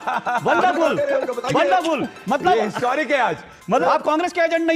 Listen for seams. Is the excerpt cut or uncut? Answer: cut